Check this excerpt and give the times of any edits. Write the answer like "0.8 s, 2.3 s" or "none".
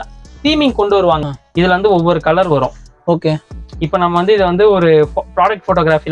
1.3 s